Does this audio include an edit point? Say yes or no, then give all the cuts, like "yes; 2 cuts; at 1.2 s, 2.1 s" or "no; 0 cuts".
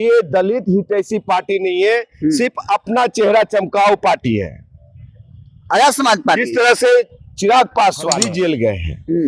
yes; 1 cut; at 8.3 s